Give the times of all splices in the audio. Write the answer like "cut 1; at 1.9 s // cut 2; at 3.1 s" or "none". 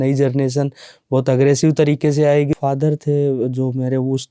cut 1; at 2.5 s